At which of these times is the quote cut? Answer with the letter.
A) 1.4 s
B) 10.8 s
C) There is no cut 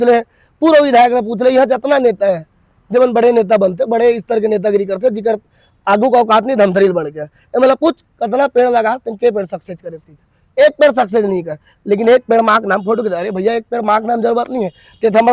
C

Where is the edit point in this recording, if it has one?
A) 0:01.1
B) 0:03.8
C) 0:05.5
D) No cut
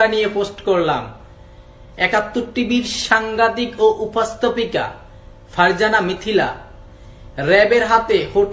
D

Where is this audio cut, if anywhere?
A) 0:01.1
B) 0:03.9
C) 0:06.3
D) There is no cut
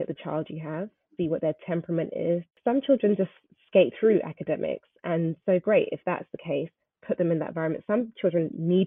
A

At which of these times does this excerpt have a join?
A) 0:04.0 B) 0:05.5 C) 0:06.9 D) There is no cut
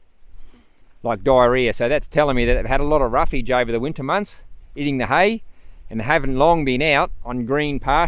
D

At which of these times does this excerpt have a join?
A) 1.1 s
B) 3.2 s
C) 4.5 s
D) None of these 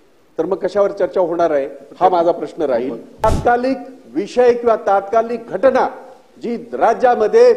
B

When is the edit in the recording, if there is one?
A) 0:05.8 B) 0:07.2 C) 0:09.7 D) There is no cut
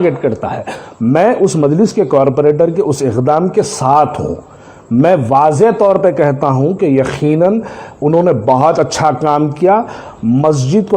D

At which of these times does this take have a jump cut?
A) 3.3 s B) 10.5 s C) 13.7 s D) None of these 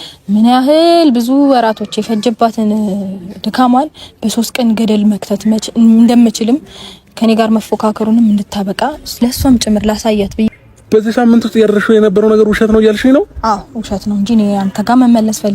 B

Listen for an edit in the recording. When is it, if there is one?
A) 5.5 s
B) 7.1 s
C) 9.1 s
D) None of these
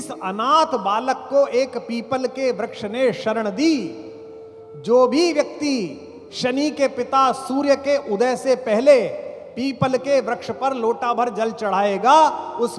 D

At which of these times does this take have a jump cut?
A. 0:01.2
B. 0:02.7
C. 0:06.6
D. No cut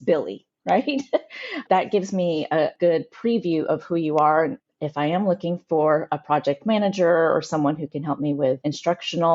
B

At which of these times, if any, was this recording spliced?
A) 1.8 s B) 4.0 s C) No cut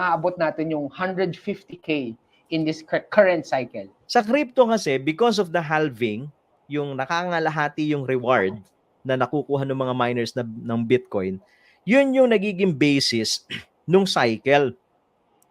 B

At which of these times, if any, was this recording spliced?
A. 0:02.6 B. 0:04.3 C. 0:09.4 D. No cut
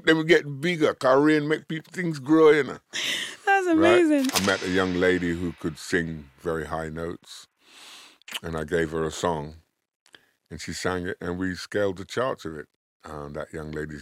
B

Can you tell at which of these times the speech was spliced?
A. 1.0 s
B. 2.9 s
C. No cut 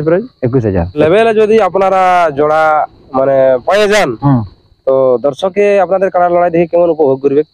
A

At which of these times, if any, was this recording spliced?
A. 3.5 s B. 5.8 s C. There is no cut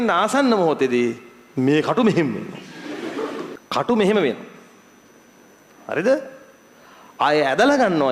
A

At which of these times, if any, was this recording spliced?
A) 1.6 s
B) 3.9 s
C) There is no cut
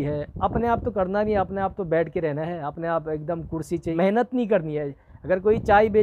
B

